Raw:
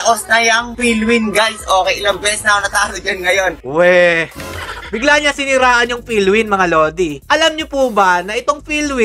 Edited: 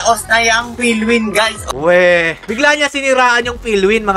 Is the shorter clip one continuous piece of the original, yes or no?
no